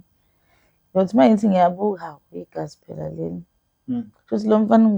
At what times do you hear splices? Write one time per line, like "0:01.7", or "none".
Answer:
none